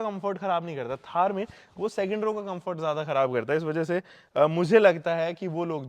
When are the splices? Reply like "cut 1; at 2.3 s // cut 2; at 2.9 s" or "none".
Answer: none